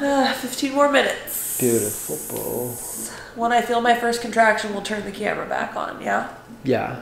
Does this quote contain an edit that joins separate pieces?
no; 0 cuts

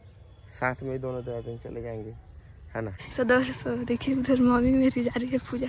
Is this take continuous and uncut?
no; 1 cut; at 3.0 s

